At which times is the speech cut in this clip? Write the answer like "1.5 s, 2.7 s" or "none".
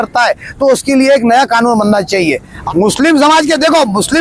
2.5 s